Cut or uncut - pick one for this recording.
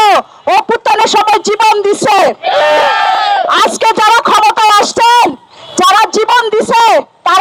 uncut